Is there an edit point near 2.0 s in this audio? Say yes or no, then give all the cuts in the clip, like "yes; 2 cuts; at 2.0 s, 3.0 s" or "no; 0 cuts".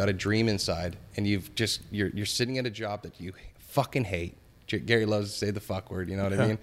no; 0 cuts